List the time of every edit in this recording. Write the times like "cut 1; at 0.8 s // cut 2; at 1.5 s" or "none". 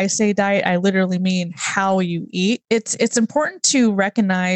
cut 1; at 2.6 s